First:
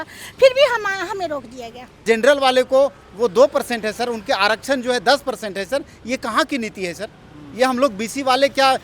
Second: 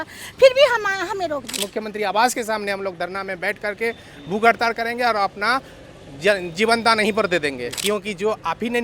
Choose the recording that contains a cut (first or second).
second